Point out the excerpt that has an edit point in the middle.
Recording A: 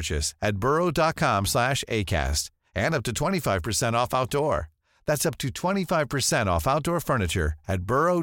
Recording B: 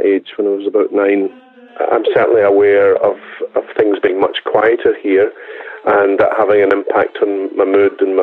B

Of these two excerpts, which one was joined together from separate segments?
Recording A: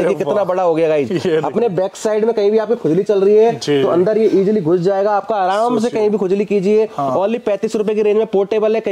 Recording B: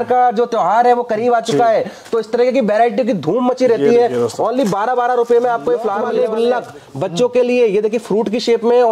B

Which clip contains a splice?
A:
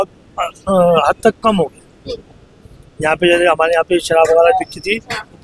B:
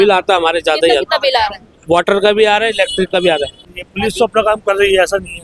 B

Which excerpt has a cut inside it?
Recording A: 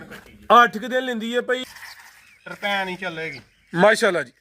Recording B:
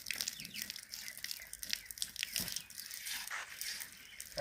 A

